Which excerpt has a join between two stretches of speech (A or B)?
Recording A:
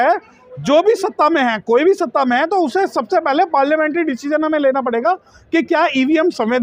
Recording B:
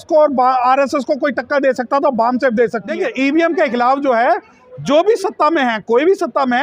B